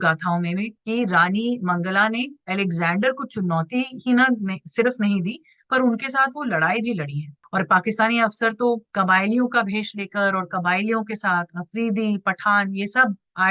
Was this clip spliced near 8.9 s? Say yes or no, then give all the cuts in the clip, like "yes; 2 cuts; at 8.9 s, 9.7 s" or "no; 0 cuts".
yes; 2 cuts; at 7.4 s, 8.9 s